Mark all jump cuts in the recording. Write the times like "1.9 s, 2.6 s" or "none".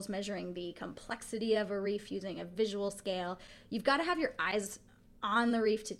none